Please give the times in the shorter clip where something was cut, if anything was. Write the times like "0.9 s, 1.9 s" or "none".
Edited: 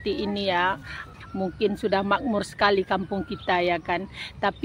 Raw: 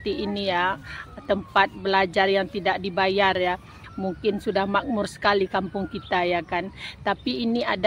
1.1 s